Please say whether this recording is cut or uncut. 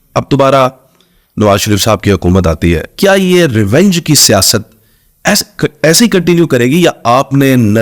uncut